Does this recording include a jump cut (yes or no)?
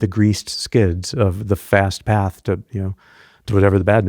no